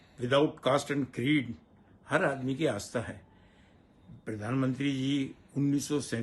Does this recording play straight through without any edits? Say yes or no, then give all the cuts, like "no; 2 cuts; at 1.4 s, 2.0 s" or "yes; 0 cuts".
yes; 0 cuts